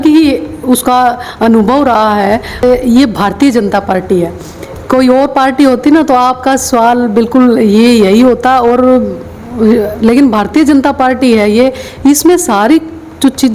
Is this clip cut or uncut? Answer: cut